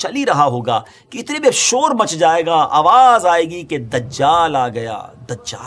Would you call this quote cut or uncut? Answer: uncut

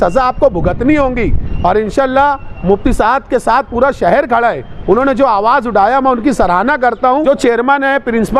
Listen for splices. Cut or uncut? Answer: cut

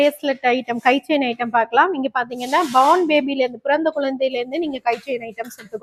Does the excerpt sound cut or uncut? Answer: uncut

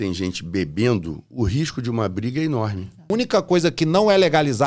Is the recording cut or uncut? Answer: cut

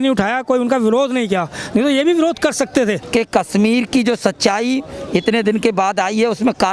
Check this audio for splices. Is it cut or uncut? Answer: cut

